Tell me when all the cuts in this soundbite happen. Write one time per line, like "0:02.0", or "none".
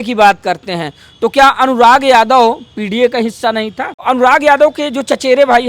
0:04.0